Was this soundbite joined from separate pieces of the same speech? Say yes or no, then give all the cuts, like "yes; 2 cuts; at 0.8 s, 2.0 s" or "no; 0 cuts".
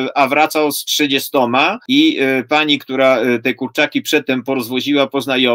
yes; 1 cut; at 1.8 s